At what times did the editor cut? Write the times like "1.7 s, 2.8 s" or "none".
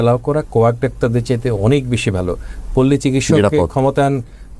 none

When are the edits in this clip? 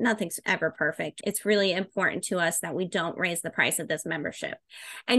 1.2 s

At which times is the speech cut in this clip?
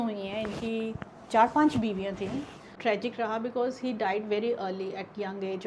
2.7 s

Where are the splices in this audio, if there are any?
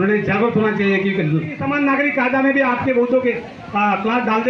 1.6 s

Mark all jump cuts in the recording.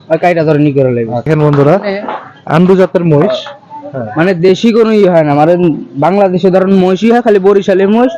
1.3 s

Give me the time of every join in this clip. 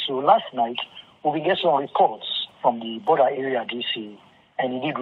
none

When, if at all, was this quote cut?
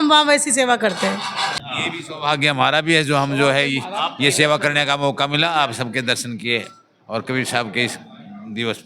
1.7 s

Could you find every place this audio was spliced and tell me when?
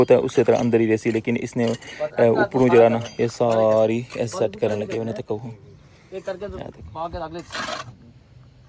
none

